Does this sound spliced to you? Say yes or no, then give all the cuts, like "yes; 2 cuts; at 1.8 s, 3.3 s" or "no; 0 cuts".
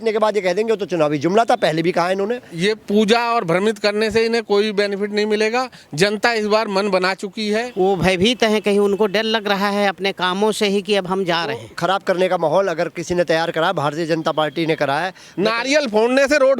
yes; 4 cuts; at 2.5 s, 7.7 s, 11.7 s, 15.2 s